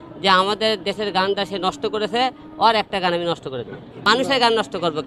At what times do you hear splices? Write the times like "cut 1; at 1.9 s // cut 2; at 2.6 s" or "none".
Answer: cut 1; at 4.1 s